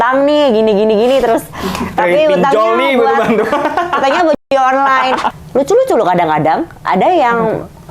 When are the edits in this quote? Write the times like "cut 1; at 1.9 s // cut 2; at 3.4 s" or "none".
cut 1; at 5.3 s